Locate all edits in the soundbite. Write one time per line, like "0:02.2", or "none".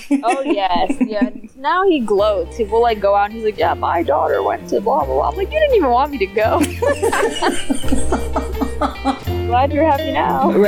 none